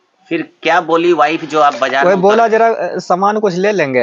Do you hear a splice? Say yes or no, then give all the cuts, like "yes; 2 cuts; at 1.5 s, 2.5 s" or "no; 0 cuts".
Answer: no; 0 cuts